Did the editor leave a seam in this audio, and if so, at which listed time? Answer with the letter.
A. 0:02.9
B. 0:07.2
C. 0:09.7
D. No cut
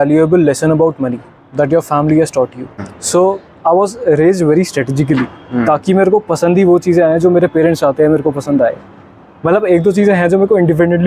A